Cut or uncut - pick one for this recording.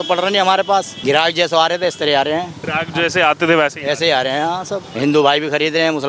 cut